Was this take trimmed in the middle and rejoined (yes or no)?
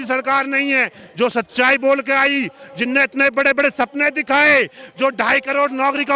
no